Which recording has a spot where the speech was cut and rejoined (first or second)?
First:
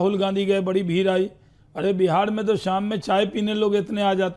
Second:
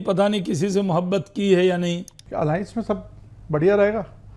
second